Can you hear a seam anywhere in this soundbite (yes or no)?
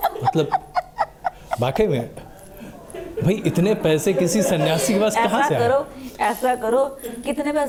no